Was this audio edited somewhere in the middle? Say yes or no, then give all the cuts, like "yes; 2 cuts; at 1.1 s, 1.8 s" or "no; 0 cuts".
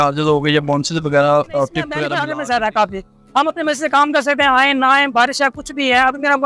yes; 1 cut; at 2.0 s